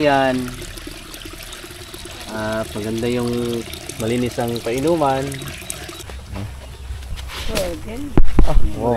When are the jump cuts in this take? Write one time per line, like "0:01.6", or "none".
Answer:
0:06.0